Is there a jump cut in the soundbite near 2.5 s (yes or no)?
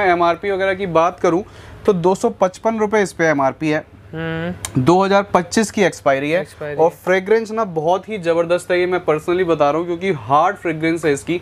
no